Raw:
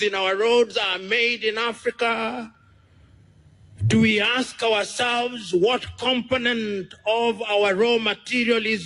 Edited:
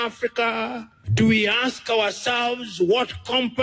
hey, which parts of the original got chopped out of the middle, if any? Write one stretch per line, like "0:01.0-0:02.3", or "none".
0:02.6-0:03.7